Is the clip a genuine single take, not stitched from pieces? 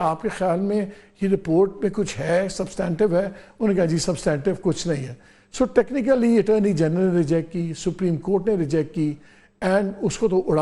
yes; 0 cuts

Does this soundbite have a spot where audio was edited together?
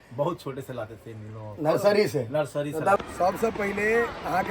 yes; 1 cut; at 3.1 s

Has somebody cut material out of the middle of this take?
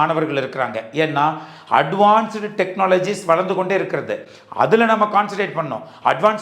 no; 0 cuts

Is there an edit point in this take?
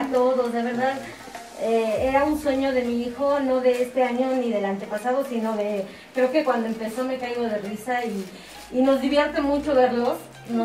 no; 0 cuts

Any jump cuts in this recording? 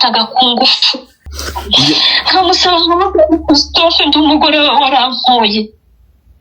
yes; 1 cut; at 1.3 s

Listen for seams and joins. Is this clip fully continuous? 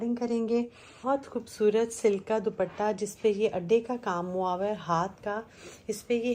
no; 1 cut; at 0.9 s

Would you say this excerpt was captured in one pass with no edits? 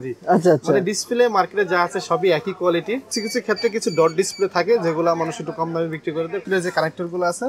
no; 2 cuts; at 3.1 s, 6.4 s

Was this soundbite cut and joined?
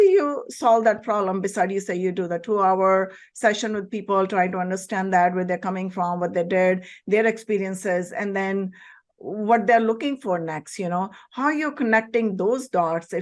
no; 0 cuts

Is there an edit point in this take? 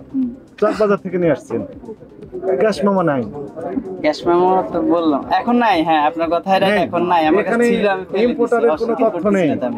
no; 0 cuts

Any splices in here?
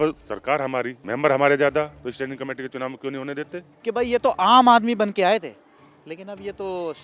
yes; 3 cuts; at 1.0 s, 2.0 s, 3.7 s

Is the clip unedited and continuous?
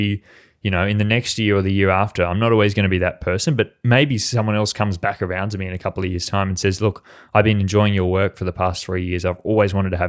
yes; 0 cuts

